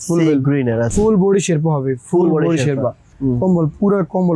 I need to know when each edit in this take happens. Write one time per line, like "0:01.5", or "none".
0:00.9
0:03.1